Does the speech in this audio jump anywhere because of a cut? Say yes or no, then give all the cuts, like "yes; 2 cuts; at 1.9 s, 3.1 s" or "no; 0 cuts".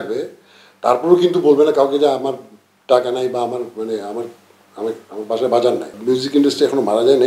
yes; 1 cut; at 5.9 s